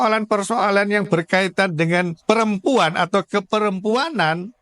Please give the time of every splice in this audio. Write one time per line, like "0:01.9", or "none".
0:02.1